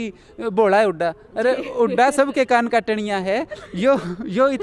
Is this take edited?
no; 0 cuts

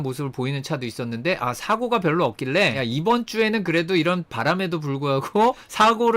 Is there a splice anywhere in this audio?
no; 0 cuts

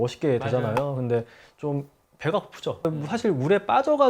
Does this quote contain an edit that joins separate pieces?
yes; 1 cut; at 2.9 s

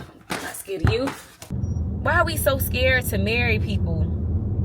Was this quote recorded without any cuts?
no; 1 cut; at 1.4 s

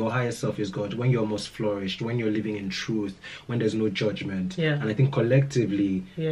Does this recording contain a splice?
no; 0 cuts

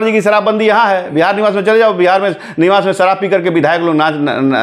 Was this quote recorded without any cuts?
yes; 0 cuts

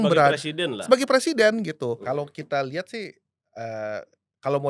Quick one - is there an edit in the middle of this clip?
yes; 1 cut; at 2.0 s

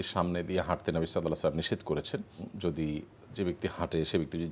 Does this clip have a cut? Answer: yes; 1 cut; at 2.5 s

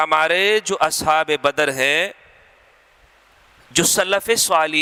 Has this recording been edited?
no; 0 cuts

